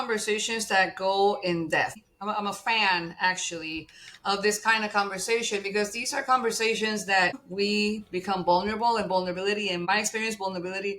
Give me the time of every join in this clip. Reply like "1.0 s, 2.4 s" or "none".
2.1 s, 7.5 s, 9.8 s